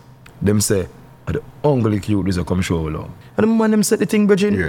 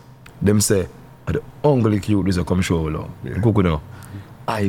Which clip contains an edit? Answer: first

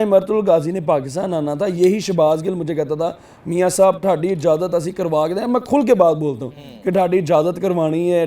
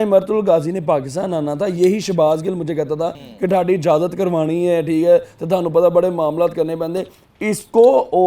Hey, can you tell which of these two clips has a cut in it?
second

